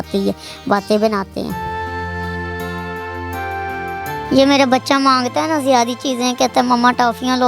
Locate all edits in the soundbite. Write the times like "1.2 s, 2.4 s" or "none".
4.3 s